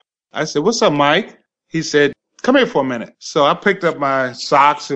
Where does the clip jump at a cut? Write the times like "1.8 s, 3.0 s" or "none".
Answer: 2.1 s